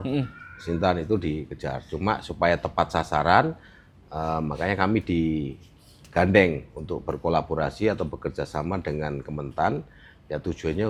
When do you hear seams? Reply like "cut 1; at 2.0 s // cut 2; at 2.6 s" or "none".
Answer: none